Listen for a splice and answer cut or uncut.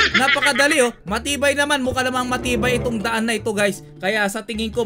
cut